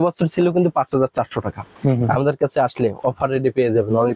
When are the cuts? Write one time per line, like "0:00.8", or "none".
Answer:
0:01.7